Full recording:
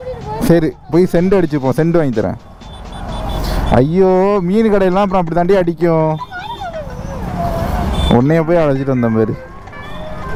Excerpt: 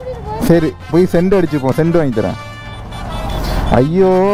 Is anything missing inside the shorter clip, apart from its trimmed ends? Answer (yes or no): no